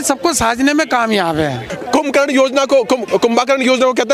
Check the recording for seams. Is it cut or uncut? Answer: cut